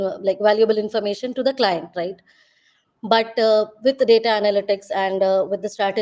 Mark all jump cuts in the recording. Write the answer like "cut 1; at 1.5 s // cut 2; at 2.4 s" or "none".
none